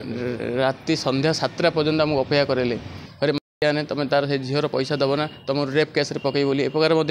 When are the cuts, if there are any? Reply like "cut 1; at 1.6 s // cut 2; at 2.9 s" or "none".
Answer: cut 1; at 3.0 s

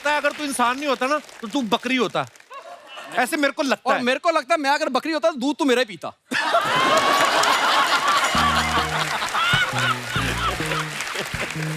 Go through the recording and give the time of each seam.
none

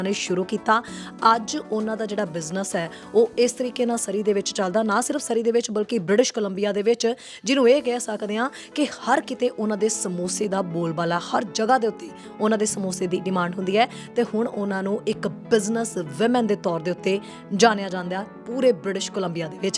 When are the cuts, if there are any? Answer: none

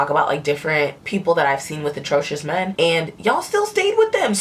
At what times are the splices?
none

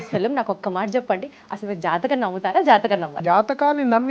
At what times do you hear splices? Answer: cut 1; at 3.2 s

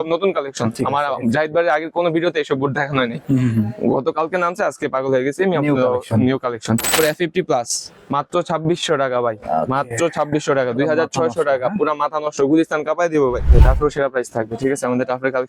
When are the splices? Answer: cut 1; at 6.9 s // cut 2; at 13.5 s

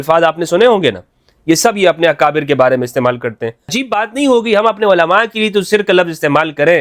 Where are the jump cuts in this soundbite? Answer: cut 1; at 3.7 s

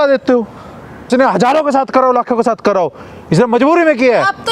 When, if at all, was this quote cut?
cut 1; at 1.1 s

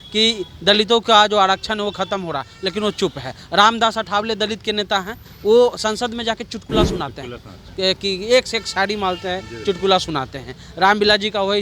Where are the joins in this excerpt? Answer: none

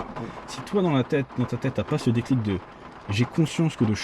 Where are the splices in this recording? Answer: none

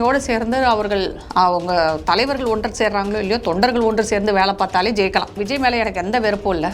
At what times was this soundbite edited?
cut 1; at 1.2 s // cut 2; at 5.3 s

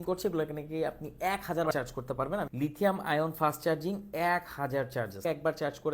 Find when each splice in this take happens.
cut 1; at 1.7 s // cut 2; at 5.2 s

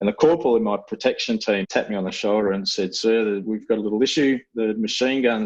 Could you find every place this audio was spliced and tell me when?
cut 1; at 1.6 s

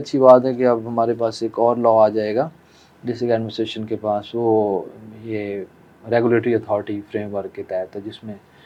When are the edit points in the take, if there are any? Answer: none

